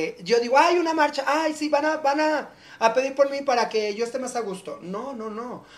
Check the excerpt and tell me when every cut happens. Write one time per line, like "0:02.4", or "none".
none